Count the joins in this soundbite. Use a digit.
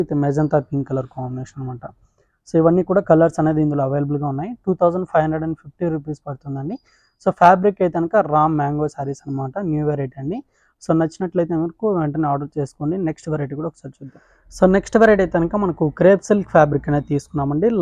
0